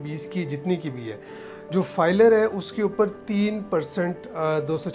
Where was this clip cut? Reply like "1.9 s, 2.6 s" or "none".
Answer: none